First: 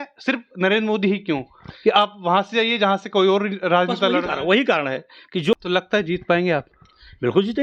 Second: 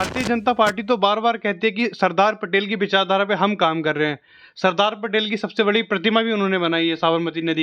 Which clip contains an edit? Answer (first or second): first